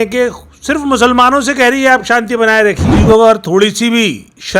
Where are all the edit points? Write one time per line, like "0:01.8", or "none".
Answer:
0:02.9